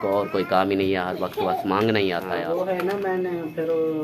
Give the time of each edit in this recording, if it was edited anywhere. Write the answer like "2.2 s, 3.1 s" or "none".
2.4 s